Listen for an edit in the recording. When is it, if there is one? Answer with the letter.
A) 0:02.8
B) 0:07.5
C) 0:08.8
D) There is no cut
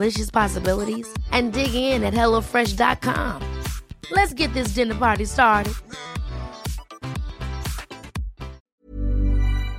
C